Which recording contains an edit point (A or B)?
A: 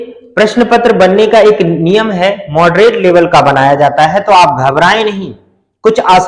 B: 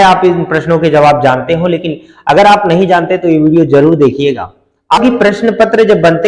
B